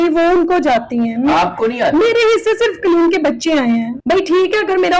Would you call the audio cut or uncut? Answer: cut